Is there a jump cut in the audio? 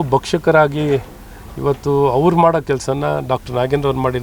no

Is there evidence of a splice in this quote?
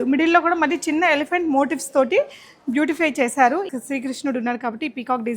yes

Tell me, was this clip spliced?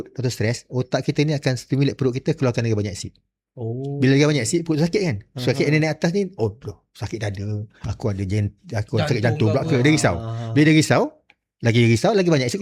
no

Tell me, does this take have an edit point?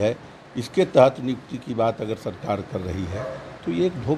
no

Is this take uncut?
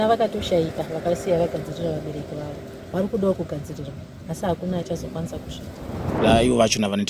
no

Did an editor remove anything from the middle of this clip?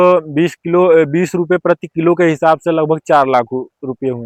no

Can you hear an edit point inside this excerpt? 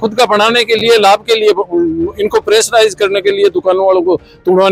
no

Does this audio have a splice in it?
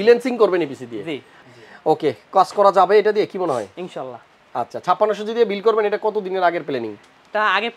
yes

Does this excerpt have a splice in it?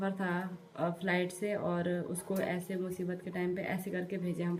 no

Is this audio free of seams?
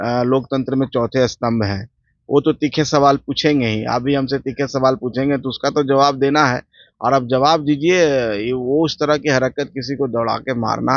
yes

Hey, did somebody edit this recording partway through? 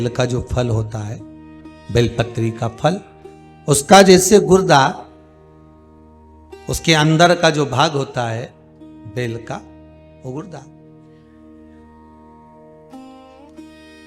yes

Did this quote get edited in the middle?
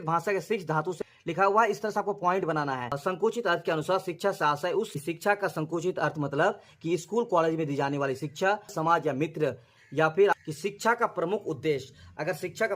yes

